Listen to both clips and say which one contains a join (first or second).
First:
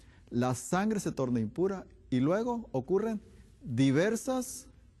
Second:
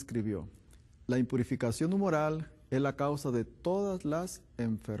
second